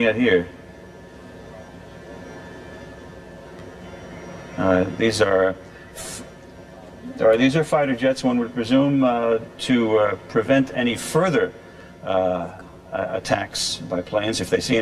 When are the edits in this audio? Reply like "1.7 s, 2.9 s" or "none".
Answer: 1.3 s